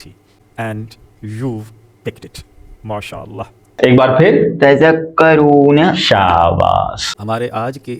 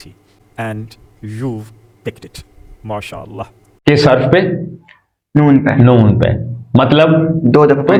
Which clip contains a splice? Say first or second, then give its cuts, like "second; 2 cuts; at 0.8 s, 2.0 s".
first; 1 cut; at 3.7 s